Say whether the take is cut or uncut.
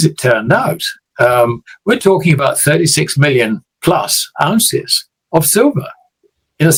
uncut